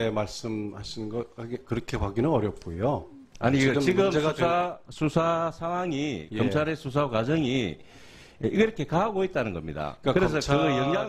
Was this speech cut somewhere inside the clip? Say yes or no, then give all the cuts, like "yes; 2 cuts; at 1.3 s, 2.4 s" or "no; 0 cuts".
yes; 1 cut; at 6.3 s